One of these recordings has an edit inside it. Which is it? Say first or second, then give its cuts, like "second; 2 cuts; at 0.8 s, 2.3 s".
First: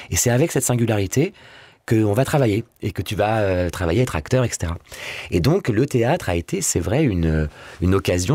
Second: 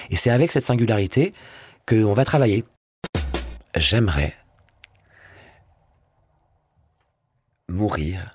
second; 1 cut; at 3.2 s